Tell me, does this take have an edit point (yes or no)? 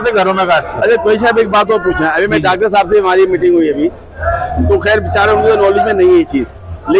no